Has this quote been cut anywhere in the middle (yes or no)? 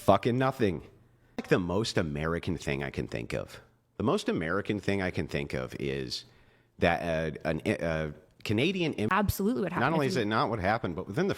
yes